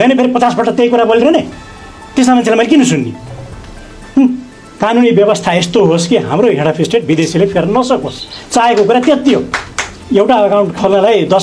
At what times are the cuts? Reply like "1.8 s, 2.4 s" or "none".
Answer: 4.6 s, 9.9 s